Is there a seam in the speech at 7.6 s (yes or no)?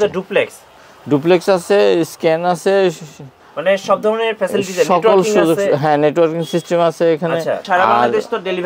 yes